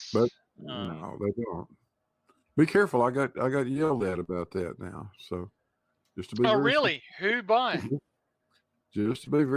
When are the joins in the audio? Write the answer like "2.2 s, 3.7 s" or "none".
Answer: none